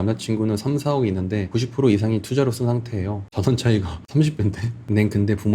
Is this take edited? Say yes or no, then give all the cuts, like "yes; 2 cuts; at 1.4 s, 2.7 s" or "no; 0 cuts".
yes; 1 cut; at 3.2 s